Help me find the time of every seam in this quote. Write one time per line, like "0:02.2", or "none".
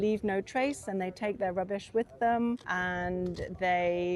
0:02.7